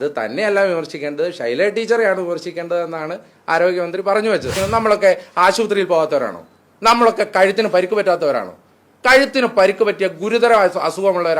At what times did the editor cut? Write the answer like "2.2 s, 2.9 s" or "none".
4.6 s